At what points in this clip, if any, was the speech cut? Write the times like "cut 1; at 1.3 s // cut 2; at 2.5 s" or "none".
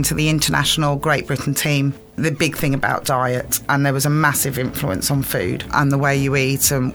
cut 1; at 2.2 s // cut 2; at 5.7 s